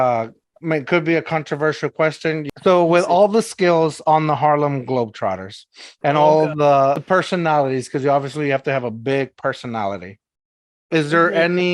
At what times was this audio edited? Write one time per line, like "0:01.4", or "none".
0:02.4
0:07.0